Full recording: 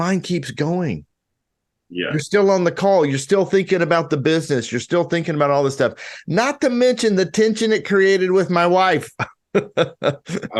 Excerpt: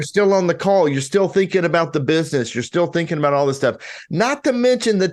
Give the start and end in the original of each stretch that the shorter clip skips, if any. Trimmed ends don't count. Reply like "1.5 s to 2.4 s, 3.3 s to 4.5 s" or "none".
none

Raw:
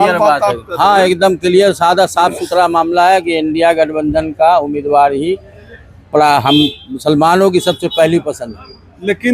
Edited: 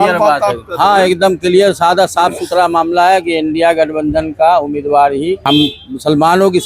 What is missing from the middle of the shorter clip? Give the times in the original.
5.4 s to 6.4 s

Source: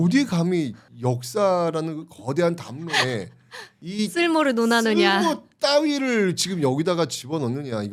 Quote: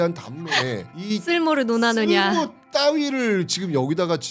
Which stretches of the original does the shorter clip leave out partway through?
3.3 s to 3.8 s

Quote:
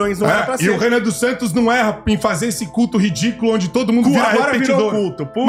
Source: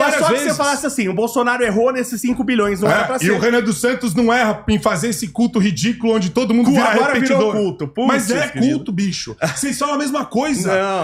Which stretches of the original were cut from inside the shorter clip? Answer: none

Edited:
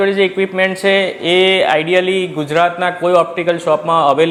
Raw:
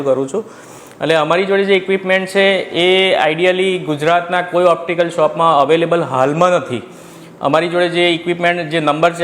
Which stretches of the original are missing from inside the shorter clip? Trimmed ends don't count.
none

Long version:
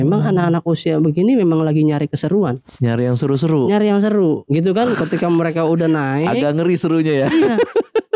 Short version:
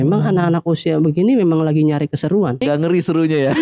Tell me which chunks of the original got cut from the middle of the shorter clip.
2.6 s to 6.4 s

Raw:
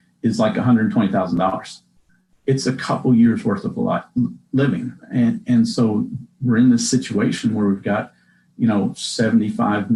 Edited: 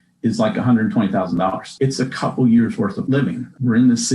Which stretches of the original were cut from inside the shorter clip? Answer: 1.6 s to 2.3 s, 3.8 s to 6.0 s

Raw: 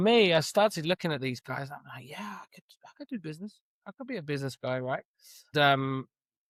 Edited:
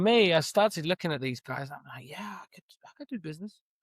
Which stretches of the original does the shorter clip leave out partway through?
none

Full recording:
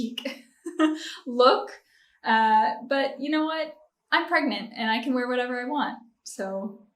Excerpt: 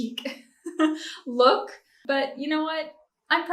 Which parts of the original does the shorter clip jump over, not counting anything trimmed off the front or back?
2.0 s to 2.8 s

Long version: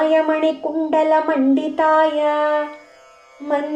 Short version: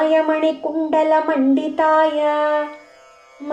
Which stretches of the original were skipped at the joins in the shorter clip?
none

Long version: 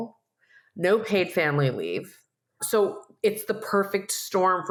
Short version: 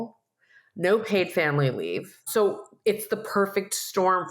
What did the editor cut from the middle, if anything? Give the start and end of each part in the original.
2.1 s to 2.5 s

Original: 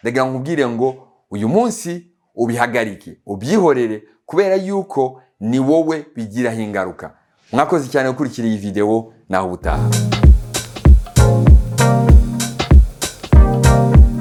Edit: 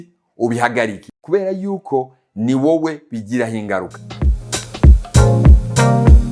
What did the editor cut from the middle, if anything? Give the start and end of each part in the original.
3.1 s to 4.1 s, 7.4 s to 10.4 s

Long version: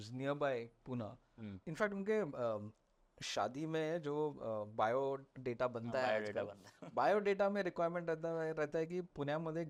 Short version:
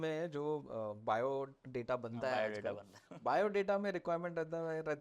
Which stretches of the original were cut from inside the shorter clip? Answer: none

